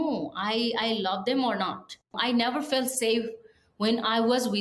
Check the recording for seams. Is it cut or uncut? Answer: cut